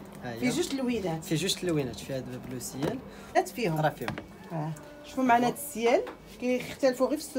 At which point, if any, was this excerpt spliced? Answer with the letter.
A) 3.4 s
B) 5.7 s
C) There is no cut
A